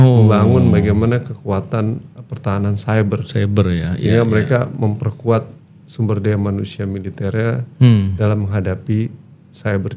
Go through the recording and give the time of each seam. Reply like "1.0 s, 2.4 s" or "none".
none